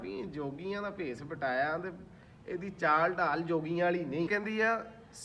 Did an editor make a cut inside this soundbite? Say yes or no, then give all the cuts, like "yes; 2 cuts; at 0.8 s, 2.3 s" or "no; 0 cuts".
yes; 1 cut; at 4.3 s